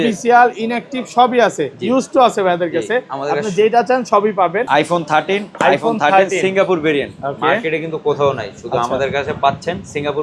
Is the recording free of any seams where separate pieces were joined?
no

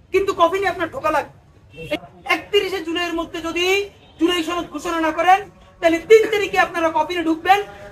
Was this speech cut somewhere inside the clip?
yes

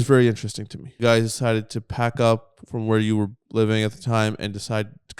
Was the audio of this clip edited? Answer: yes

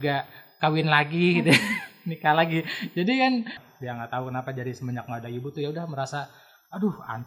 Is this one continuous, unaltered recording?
no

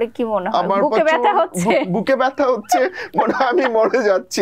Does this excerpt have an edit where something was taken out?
no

